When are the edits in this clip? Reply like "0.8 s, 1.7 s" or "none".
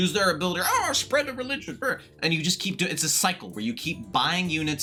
none